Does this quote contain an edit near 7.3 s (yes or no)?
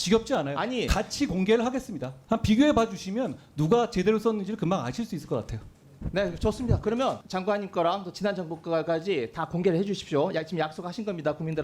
yes